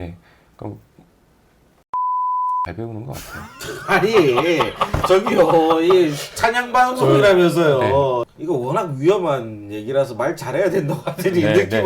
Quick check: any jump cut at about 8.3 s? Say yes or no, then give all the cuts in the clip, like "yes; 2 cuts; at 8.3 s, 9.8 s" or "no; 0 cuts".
yes; 1 cut; at 8.3 s